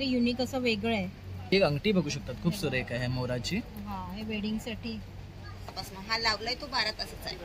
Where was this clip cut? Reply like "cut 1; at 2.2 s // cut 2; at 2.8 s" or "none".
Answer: cut 1; at 1.5 s // cut 2; at 5.8 s